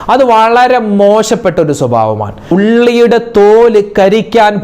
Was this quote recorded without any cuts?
no; 1 cut; at 2.4 s

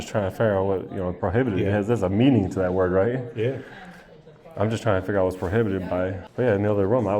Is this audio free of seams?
no; 1 cut; at 6.2 s

